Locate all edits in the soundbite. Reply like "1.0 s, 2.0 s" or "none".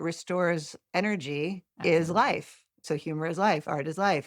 1.7 s, 2.8 s